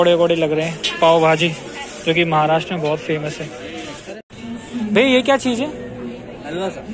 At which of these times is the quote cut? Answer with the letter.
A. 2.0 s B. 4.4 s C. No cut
C